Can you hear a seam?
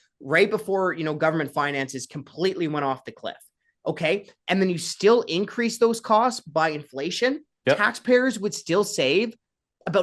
yes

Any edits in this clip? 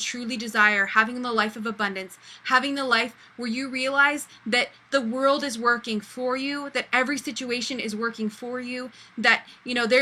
no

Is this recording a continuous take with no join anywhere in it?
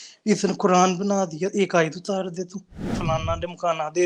no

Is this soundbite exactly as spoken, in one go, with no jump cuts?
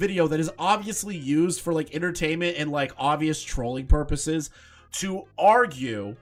yes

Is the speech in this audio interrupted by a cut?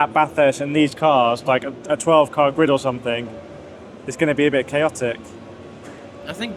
no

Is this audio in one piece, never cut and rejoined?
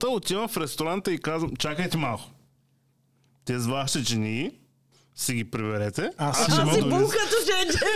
yes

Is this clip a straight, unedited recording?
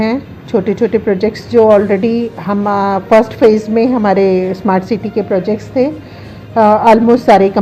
yes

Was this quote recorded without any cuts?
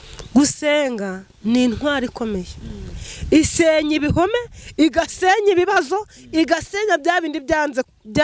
yes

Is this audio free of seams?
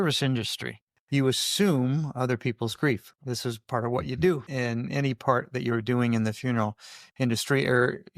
no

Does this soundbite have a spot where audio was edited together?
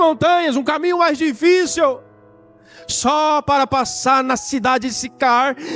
no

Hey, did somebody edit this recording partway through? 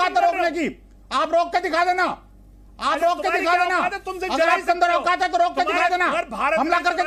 no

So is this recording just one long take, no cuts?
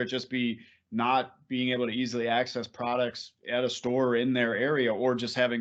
yes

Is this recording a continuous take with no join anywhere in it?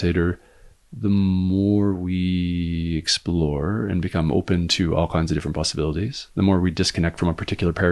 yes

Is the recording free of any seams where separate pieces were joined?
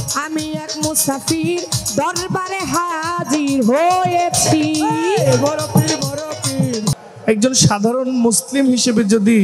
no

